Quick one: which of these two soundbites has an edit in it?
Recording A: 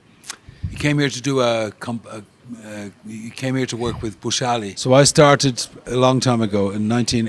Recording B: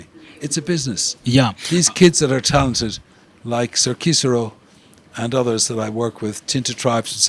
A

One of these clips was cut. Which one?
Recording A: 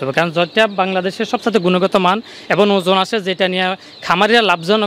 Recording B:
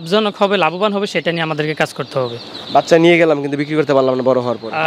B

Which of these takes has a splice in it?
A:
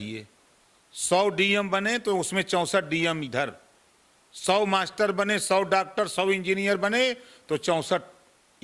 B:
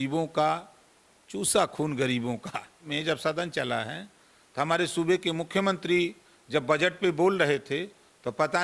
B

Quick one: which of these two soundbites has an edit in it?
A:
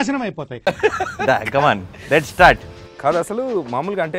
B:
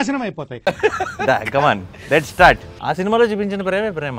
B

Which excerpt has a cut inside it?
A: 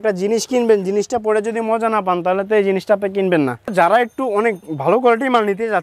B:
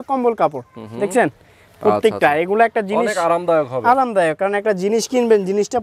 A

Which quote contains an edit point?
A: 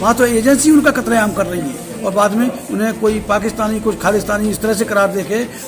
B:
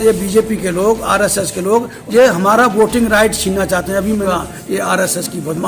B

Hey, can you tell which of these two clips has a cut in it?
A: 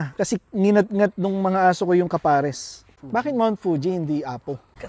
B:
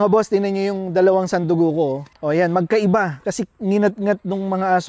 A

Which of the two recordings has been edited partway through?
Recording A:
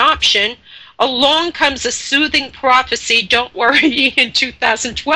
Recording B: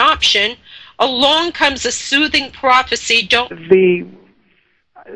A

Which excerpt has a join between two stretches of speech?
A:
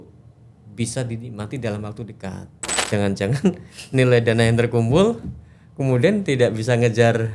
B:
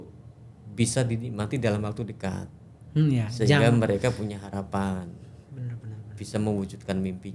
A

